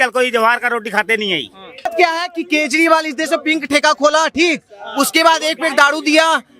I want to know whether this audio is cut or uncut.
cut